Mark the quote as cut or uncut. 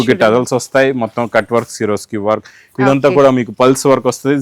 uncut